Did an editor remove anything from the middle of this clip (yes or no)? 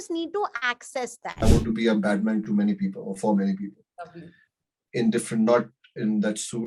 yes